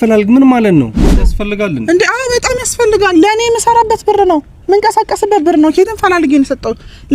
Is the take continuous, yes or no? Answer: no